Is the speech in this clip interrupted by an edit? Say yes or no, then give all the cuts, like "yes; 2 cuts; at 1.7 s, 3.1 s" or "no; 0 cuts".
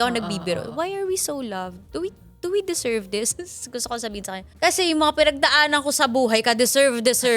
no; 0 cuts